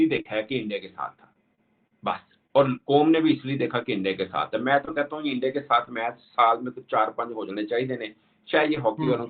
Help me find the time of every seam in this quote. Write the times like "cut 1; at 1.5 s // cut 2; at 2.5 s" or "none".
none